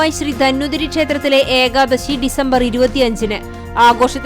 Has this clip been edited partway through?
no; 0 cuts

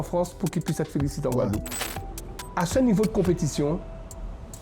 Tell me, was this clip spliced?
yes; 1 cut; at 1.7 s

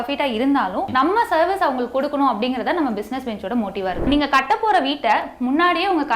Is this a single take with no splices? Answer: no; 1 cut; at 4.0 s

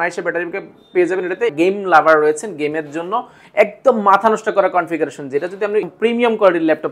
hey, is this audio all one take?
no; 2 cuts; at 1.5 s, 5.9 s

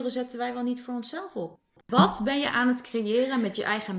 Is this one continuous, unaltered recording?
no; 1 cut; at 1.8 s

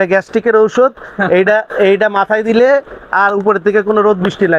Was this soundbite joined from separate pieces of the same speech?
no; 0 cuts

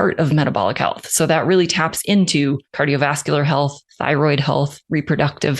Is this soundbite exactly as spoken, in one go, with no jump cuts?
no; 3 cuts; at 2.7 s, 3.9 s, 4.8 s

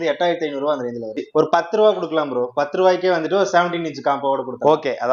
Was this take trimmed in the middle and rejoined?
yes; 1 cut; at 1.2 s

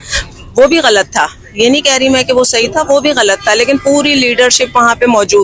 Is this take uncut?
yes; 0 cuts

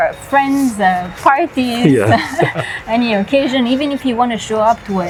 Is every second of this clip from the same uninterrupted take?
yes; 0 cuts

